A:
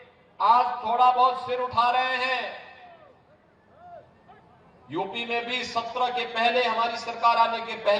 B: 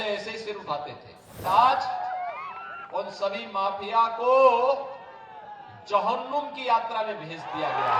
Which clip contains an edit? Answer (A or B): B